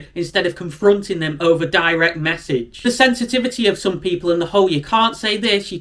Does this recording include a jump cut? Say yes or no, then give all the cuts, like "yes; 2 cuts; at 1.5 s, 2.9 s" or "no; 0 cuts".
yes; 1 cut; at 2.8 s